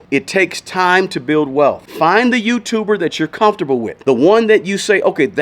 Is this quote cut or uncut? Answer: cut